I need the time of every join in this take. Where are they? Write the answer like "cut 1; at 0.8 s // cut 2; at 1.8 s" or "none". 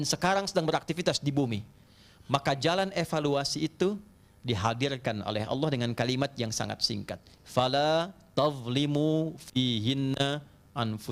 cut 1; at 1.8 s